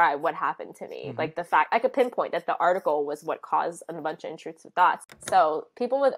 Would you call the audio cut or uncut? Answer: cut